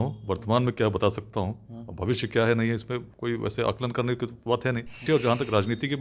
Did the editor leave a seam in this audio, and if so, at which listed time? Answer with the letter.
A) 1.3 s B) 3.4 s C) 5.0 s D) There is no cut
C